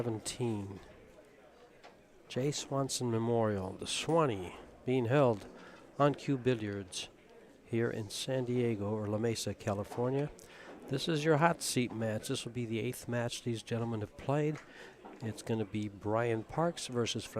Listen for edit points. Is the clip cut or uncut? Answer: cut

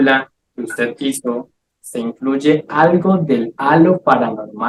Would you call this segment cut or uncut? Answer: uncut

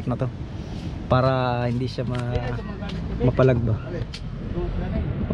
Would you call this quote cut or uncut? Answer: uncut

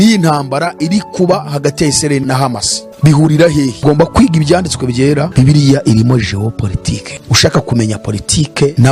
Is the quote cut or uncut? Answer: cut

